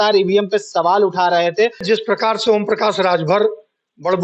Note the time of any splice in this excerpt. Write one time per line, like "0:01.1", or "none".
0:01.8